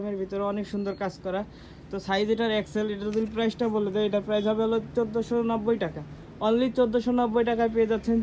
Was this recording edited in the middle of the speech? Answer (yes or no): no